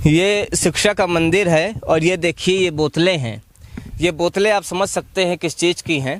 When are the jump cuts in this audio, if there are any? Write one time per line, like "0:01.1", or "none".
none